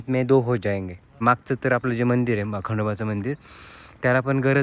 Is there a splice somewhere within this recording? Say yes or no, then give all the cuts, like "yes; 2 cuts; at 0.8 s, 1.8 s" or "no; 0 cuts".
yes; 1 cut; at 1.1 s